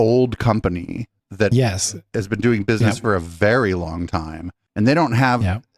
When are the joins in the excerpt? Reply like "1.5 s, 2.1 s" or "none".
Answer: none